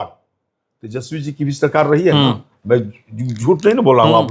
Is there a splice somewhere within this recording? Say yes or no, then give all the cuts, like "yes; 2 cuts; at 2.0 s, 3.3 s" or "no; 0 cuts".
no; 0 cuts